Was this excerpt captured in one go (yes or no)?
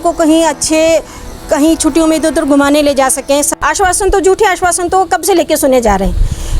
no